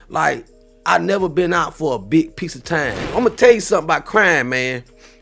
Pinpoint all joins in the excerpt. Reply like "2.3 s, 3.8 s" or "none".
3.1 s